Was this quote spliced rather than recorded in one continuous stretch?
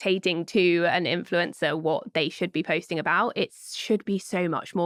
no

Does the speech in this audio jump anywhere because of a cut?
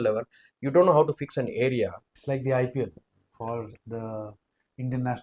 no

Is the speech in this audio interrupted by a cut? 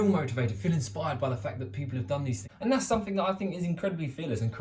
yes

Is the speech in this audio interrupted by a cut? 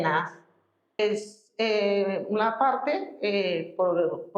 yes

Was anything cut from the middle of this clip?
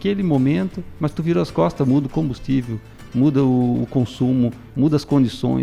no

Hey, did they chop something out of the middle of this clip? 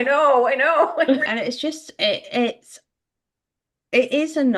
yes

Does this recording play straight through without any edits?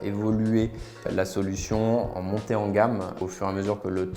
no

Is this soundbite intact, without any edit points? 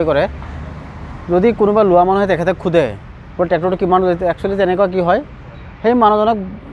yes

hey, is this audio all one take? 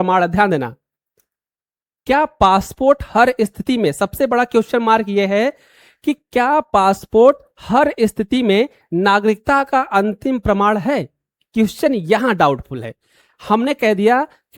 yes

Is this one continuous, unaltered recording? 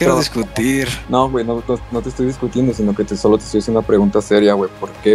no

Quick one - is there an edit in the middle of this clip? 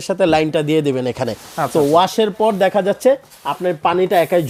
no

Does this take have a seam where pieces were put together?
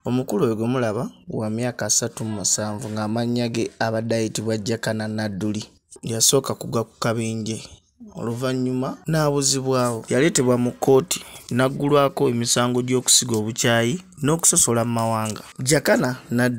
yes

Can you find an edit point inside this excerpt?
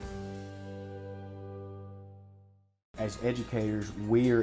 yes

